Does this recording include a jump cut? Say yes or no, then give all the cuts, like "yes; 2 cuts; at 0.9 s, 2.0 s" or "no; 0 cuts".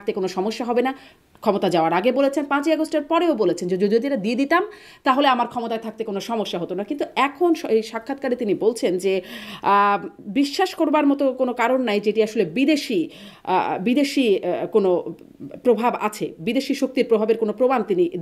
no; 0 cuts